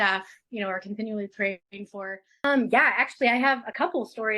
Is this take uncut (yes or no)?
no